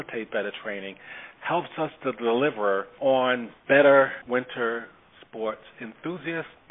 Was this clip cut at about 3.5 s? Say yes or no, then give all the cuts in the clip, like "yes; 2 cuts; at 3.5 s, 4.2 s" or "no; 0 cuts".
yes; 3 cuts; at 2.9 s, 3.5 s, 4.2 s